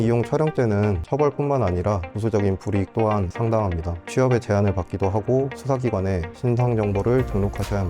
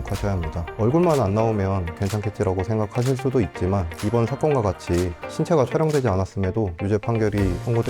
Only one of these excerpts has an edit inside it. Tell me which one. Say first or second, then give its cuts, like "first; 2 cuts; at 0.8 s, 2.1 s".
first; 3 cuts; at 1.0 s, 3.3 s, 6.3 s